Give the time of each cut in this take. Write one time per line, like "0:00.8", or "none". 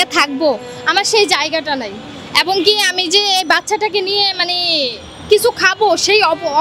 none